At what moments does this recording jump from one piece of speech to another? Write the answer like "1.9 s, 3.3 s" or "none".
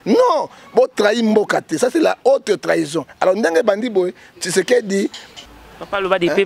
5.3 s